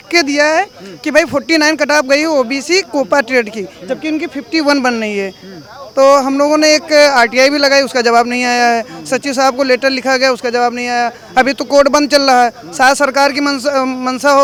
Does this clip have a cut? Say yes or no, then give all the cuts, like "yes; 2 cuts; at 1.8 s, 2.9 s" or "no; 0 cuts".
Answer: no; 0 cuts